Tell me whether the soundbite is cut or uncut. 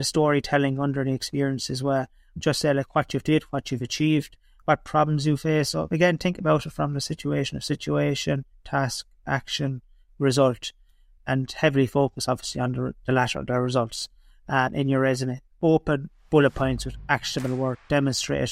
cut